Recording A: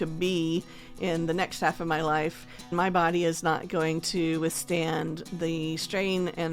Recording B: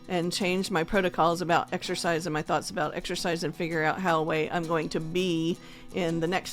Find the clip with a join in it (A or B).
A